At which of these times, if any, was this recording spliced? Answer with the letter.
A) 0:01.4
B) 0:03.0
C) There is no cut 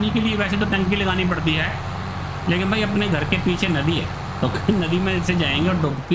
C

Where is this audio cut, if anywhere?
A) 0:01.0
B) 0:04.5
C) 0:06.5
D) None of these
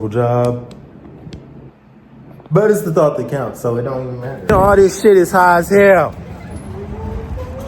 B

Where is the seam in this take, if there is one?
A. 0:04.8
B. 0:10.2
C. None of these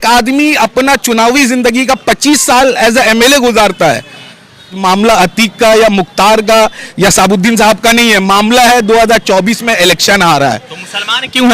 A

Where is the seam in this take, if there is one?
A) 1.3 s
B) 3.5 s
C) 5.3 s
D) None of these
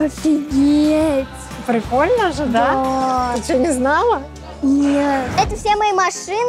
C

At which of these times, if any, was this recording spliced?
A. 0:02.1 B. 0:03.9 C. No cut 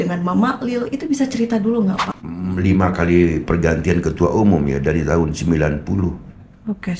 A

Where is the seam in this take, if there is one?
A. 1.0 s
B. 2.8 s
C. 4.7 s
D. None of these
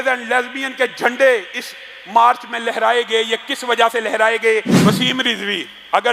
C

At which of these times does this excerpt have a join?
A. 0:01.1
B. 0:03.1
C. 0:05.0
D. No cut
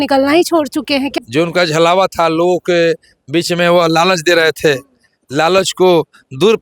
A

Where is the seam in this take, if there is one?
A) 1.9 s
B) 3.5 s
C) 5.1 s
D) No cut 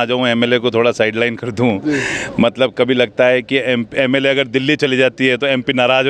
D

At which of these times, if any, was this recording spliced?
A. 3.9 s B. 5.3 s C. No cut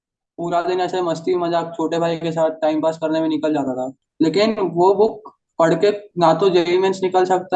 A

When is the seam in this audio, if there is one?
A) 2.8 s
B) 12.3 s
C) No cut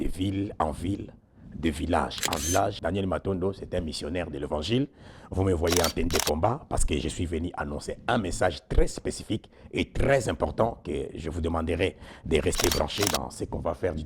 A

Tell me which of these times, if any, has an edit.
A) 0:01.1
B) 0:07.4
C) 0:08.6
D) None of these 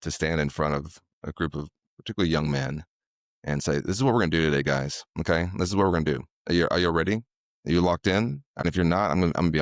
C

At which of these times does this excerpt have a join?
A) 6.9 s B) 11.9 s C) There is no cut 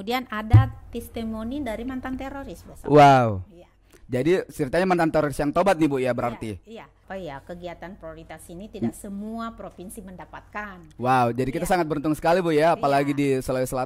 A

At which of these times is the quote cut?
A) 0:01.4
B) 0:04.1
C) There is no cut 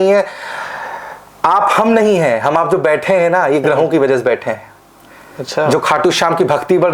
C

